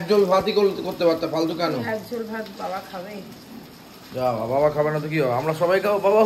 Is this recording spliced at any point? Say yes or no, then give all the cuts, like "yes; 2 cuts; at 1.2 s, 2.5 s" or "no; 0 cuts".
no; 0 cuts